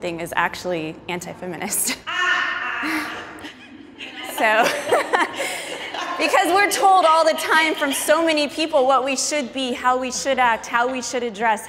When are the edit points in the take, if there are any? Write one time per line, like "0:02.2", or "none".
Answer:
none